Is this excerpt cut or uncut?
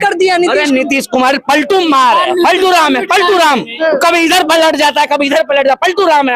uncut